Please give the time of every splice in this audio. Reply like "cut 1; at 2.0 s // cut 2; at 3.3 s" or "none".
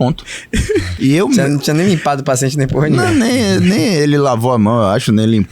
cut 1; at 0.9 s